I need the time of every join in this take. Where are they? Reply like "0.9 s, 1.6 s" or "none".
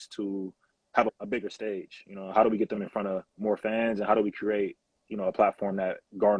none